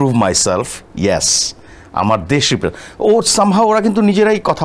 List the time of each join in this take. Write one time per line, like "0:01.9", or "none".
none